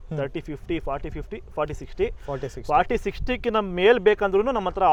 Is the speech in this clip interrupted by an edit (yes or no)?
no